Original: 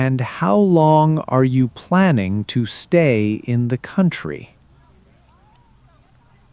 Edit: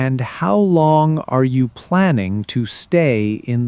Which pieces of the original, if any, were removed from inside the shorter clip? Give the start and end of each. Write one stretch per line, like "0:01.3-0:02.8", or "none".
none